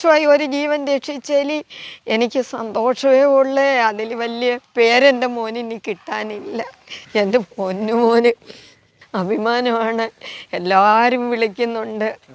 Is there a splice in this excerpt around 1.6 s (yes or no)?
no